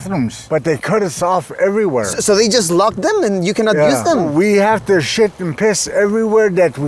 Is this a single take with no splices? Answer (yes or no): yes